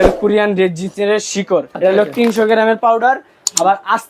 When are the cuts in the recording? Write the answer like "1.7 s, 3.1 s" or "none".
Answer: 1.7 s